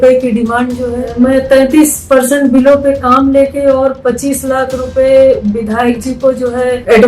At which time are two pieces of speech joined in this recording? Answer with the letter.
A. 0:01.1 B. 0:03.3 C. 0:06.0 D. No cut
A